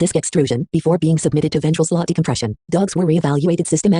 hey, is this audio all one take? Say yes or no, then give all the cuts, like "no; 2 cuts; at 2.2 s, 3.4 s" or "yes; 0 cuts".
no; 1 cut; at 2.1 s